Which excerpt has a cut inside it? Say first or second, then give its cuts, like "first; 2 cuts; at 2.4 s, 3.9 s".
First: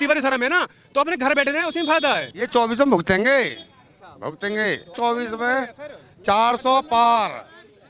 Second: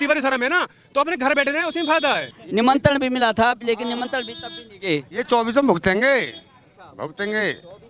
first; 2 cuts; at 2.4 s, 4.9 s